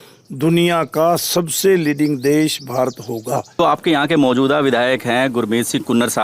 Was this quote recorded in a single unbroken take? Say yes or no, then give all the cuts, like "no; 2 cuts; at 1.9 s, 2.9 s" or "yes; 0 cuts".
no; 1 cut; at 3.6 s